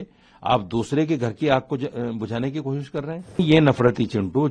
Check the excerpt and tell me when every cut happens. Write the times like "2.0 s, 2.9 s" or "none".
3.4 s